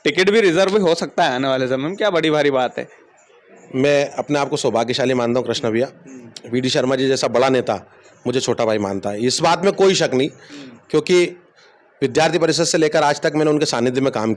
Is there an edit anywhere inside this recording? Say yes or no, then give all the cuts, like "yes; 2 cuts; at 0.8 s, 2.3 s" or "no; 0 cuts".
no; 0 cuts